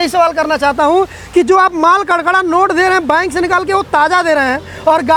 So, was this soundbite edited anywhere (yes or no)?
no